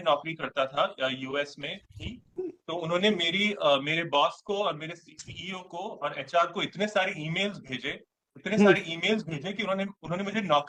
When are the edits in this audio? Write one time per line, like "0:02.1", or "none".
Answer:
none